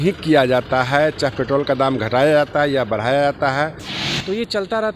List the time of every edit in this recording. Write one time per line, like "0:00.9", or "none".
0:03.9